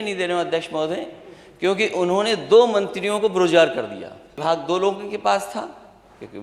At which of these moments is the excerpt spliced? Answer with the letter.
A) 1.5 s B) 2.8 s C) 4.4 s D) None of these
C